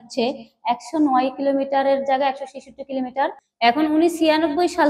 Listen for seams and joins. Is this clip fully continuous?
no; 1 cut; at 3.4 s

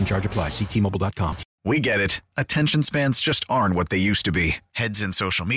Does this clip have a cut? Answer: yes; 1 cut; at 1.5 s

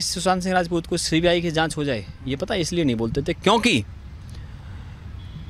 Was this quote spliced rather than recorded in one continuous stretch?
no; 0 cuts

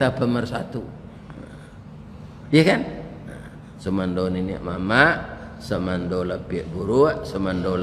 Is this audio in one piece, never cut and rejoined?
yes; 0 cuts

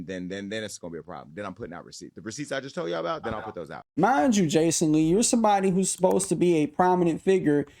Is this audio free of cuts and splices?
no; 1 cut; at 3.9 s

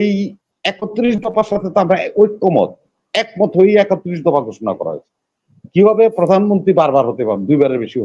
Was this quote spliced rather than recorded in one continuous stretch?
no; 0 cuts

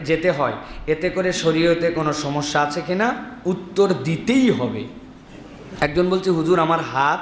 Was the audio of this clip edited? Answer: yes; 1 cut; at 5.7 s

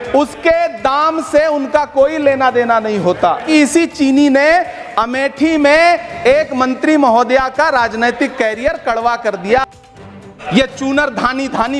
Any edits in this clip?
yes; 2 cuts; at 3.4 s, 10.3 s

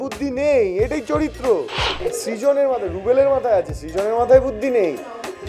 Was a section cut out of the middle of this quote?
yes; 1 cut; at 1.8 s

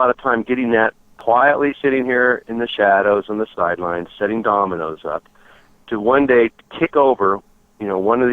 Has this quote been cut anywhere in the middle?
yes; 1 cut; at 1.1 s

